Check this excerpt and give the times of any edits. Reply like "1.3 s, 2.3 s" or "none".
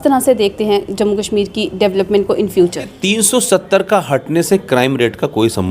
3.0 s